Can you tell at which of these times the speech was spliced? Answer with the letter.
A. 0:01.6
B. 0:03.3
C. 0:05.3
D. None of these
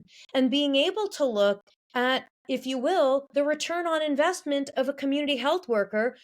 B